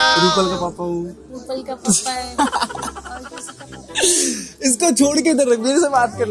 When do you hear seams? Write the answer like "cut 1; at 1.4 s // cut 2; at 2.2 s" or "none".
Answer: none